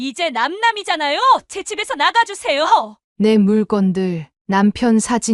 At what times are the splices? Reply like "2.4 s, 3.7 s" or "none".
3.0 s